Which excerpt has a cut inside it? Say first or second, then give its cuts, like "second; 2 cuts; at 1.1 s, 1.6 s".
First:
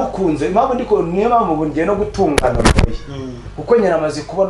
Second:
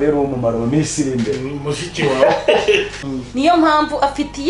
second; 1 cut; at 3.0 s